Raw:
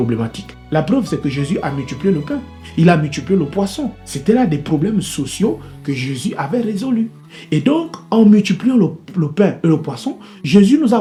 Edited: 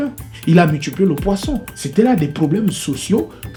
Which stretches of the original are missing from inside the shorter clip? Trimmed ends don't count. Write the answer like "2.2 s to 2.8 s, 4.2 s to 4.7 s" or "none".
none